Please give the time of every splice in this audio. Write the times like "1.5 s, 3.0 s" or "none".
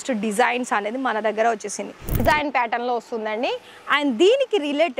2.2 s